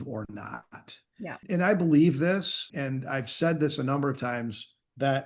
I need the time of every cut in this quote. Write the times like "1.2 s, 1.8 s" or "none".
1.4 s, 2.6 s